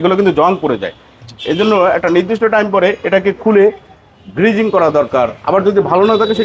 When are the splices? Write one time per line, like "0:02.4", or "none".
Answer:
none